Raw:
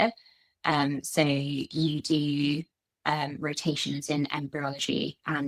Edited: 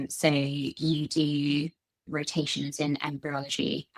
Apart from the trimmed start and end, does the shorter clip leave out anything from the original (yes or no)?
yes